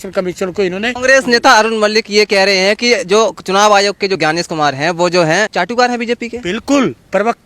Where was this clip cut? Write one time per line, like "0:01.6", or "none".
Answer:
0:01.0
0:04.2
0:05.5